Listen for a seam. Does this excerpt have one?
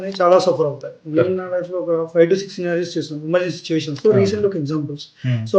yes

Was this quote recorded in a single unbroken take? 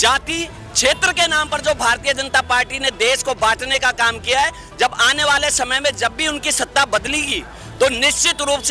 yes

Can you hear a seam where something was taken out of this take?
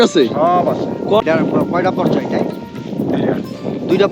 yes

